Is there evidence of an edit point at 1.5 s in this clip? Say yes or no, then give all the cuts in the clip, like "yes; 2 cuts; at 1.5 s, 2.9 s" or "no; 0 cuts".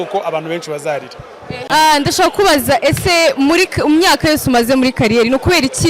yes; 1 cut; at 1.5 s